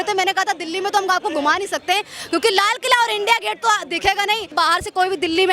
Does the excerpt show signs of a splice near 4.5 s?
yes; 1 cut; at 4.5 s

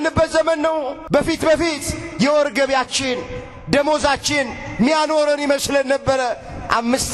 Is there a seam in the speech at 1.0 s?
yes; 1 cut; at 1.0 s

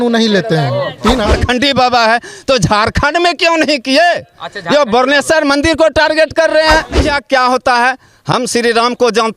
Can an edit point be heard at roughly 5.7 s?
no; 2 cuts; at 1.3 s, 7.0 s

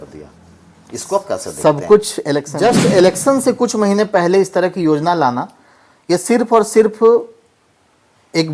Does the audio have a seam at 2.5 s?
yes; 1 cut; at 2.5 s

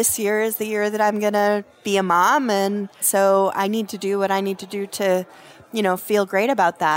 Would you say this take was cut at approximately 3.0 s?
yes; 2 cuts; at 1.7 s, 3.0 s

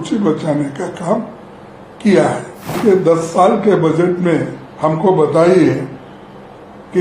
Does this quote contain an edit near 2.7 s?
yes; 1 cut; at 2.7 s

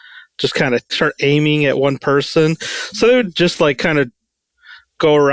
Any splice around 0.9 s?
yes; 1 cut; at 0.9 s

